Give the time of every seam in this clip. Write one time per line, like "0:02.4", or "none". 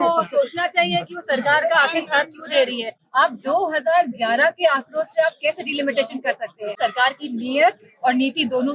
0:03.0
0:06.7